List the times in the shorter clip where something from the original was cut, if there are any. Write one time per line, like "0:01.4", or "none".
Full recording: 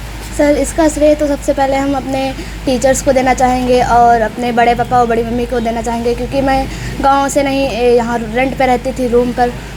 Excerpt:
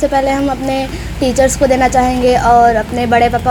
none